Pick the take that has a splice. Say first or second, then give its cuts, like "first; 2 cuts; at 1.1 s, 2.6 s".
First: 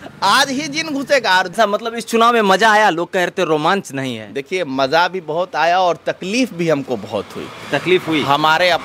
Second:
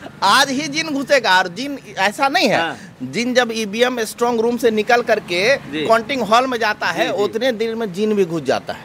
first; 1 cut; at 1.5 s